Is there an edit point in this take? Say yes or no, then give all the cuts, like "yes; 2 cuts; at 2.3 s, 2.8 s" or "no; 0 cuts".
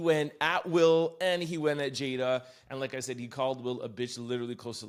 no; 0 cuts